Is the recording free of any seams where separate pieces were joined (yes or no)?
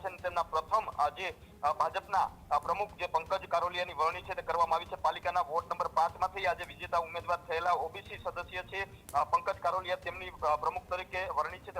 yes